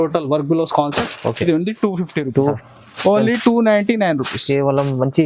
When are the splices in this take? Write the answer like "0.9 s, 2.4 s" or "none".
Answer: 2.7 s